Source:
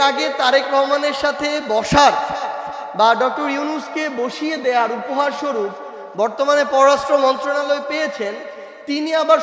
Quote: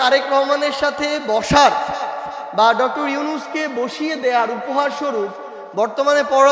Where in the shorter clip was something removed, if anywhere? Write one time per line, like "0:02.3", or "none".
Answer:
none